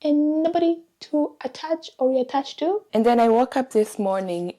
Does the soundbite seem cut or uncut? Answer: cut